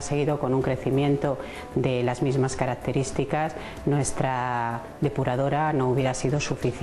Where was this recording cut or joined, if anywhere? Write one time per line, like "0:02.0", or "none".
none